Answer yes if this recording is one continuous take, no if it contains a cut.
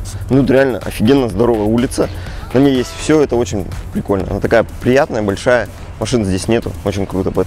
yes